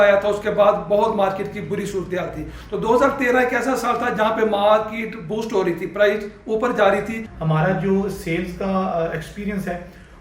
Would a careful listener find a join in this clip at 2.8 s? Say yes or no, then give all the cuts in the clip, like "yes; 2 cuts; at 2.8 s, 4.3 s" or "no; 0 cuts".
no; 1 cut; at 7.2 s